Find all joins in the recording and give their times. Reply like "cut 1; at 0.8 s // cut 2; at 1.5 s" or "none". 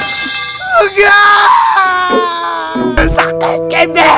cut 1; at 3.0 s